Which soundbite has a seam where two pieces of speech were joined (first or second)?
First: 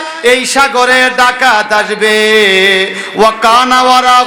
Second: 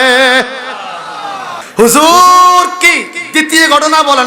second